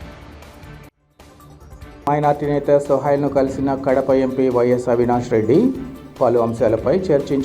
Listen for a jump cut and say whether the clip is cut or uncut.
uncut